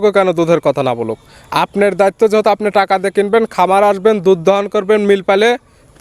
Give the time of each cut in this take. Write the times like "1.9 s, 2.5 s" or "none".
none